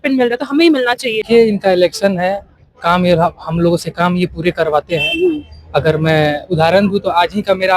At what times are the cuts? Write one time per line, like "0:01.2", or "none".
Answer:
0:01.2